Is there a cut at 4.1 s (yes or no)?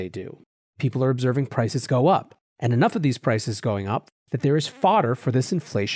yes